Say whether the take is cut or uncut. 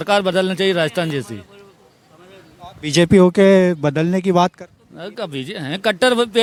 uncut